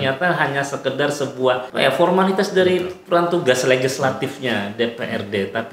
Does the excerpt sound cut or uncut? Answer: cut